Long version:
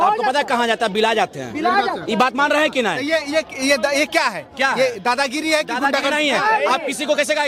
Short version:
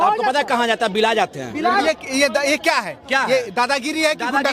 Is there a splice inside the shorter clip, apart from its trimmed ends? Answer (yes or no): yes